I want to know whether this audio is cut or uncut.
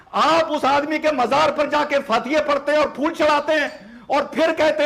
uncut